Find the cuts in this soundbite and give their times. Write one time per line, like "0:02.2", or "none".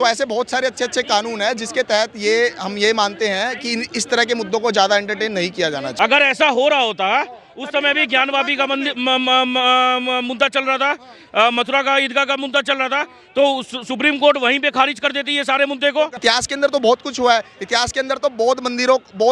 0:05.9
0:16.2